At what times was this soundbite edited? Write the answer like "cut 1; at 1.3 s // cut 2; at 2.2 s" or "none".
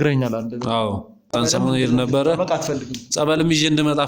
cut 1; at 1.3 s